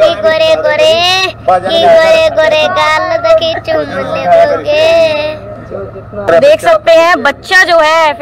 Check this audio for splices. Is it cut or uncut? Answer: cut